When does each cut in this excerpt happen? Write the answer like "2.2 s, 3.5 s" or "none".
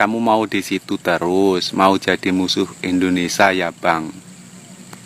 none

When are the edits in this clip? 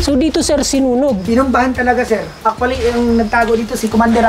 1.2 s, 2.3 s

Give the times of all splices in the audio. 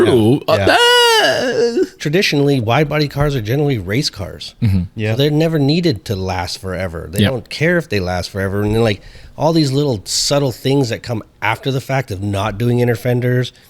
2.0 s

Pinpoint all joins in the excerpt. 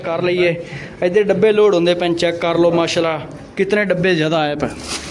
none

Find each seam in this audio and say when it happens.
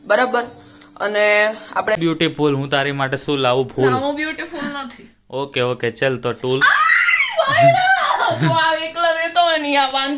2.0 s

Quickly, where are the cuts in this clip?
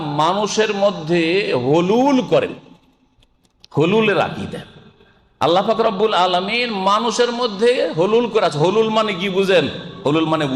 none

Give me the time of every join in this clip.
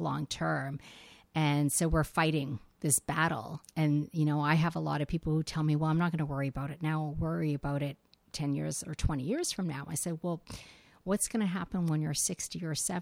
none

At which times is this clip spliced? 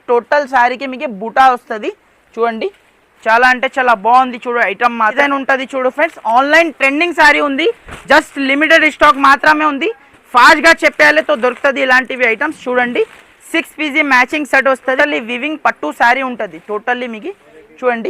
5.1 s, 15.0 s

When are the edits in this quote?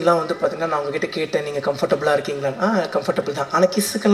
none

